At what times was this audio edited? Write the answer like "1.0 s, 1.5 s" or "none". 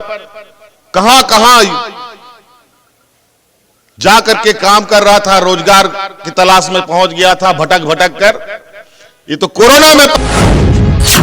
10.2 s